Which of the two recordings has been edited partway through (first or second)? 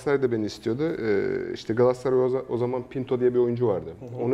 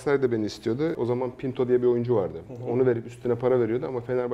second